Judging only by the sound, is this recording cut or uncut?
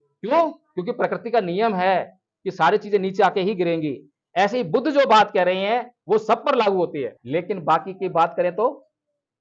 cut